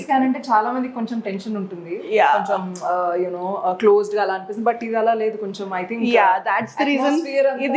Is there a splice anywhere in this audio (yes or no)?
no